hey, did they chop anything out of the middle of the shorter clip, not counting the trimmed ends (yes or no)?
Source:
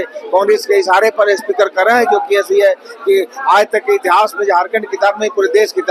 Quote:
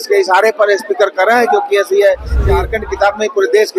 yes